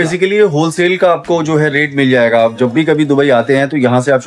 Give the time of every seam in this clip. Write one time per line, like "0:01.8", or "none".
none